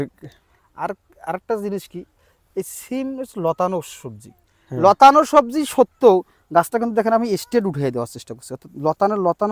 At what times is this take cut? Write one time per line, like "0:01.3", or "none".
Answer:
none